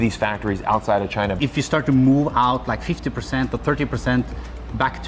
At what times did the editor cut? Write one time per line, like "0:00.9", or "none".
0:01.4